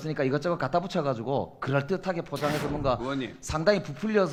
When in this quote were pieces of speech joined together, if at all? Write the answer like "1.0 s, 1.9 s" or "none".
none